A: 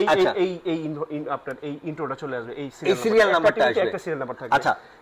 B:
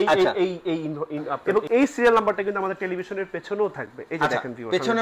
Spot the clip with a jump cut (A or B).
B